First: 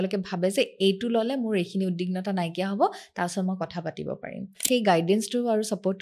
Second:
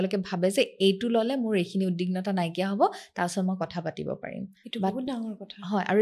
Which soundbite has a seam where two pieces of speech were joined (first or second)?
first